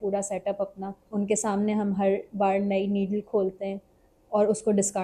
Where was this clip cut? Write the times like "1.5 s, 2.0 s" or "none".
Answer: 1.0 s